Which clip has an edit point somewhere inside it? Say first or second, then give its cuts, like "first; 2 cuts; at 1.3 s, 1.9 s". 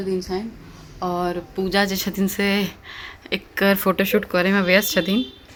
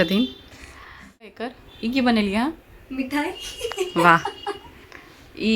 second; 1 cut; at 1.5 s